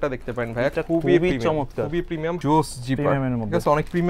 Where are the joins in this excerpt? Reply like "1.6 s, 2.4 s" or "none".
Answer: 2.4 s